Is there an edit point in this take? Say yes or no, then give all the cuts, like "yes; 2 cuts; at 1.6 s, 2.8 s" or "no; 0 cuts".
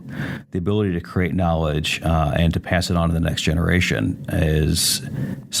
no; 0 cuts